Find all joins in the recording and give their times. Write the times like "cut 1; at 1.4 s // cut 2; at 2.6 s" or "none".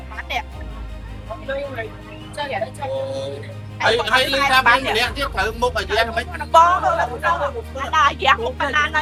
none